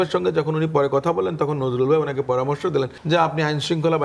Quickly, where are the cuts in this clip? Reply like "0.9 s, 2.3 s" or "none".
3.0 s